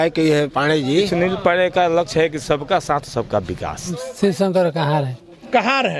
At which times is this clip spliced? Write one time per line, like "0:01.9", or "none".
0:01.1
0:03.9